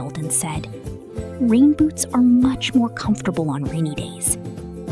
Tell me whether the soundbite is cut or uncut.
cut